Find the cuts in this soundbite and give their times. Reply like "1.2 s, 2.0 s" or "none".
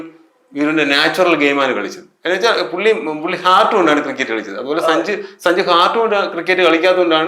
none